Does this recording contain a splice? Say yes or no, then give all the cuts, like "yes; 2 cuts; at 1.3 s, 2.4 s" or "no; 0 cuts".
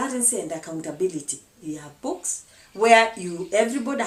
no; 0 cuts